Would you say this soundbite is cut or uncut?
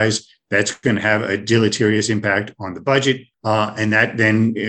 cut